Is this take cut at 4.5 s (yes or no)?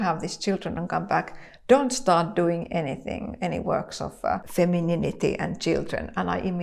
yes